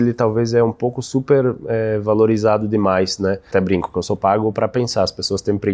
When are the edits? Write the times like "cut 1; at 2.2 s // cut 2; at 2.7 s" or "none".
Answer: cut 1; at 3.5 s